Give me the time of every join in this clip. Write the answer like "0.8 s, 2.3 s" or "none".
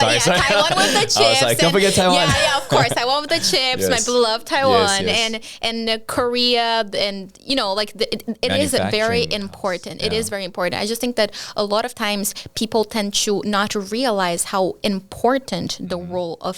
none